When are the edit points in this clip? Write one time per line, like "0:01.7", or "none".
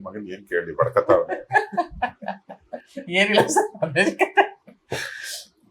none